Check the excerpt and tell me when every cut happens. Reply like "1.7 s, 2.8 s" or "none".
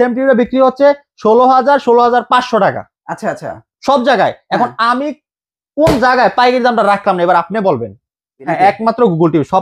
8.4 s